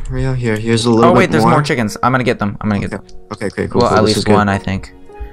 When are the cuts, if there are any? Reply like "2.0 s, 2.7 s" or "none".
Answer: 3.0 s

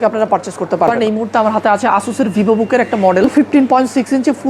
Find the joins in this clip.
1.0 s, 3.3 s

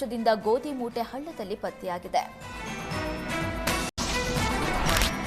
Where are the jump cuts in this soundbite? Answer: 3.9 s

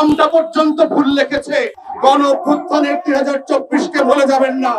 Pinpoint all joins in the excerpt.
1.8 s

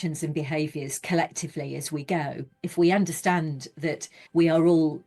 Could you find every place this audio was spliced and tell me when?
2.5 s, 4.1 s

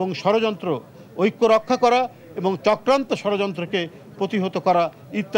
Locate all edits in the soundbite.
none

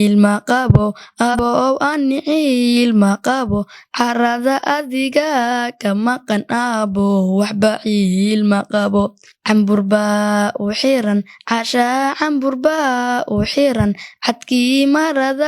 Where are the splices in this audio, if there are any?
1.4 s

